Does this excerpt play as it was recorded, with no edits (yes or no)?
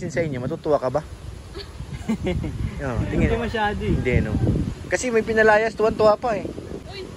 yes